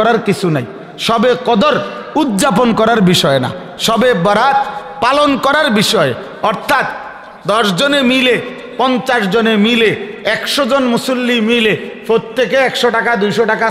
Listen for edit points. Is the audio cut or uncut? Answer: uncut